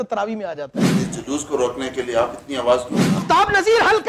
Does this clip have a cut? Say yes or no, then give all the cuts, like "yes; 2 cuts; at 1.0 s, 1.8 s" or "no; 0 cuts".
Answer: yes; 2 cuts; at 0.9 s, 3.2 s